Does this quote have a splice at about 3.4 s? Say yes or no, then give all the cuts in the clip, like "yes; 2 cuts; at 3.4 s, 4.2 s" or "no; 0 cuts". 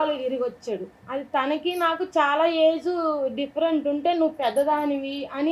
no; 1 cut; at 1.0 s